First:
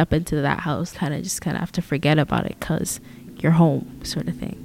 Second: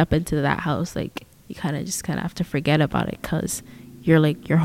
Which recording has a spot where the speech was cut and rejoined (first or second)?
first